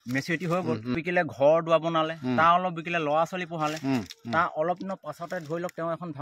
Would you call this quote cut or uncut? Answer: cut